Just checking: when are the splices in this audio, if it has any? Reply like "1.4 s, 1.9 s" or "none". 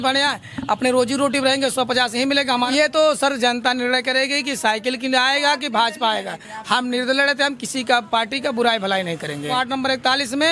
2.7 s, 9.5 s